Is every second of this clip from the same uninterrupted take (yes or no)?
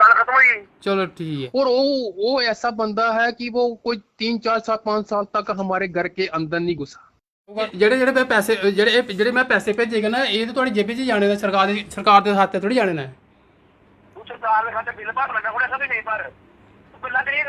no